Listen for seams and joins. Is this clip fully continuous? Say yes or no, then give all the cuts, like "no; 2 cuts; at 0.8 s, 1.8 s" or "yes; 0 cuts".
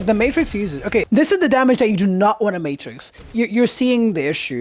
no; 2 cuts; at 1.1 s, 3.3 s